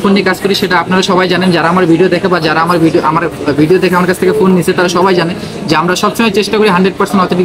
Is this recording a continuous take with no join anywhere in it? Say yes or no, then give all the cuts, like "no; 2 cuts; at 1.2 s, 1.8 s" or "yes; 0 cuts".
yes; 0 cuts